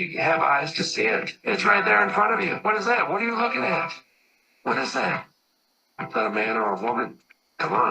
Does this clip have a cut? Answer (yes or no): no